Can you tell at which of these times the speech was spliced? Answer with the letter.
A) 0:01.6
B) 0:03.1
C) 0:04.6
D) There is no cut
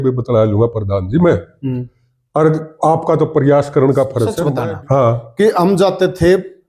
C